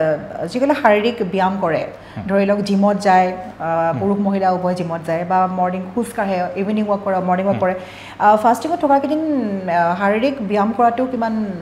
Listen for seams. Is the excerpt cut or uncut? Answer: uncut